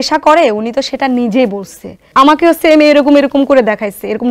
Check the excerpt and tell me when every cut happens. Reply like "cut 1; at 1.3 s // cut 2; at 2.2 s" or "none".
cut 1; at 2.0 s